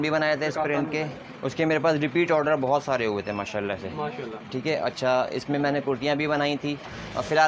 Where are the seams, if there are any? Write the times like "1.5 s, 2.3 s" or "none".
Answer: none